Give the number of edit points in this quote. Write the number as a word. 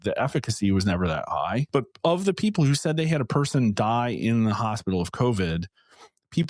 one